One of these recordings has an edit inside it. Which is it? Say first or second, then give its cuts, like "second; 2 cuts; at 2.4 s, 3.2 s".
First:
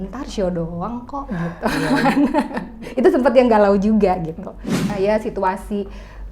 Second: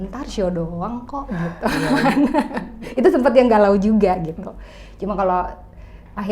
first; 1 cut; at 4.8 s